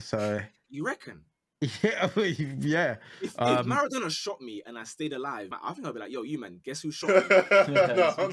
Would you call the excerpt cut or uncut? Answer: cut